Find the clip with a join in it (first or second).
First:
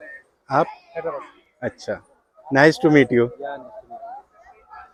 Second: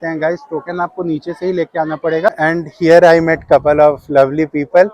second